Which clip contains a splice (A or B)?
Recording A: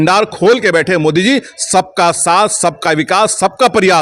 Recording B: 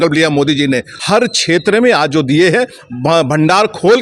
B